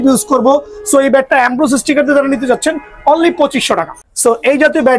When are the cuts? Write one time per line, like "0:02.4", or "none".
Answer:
0:03.9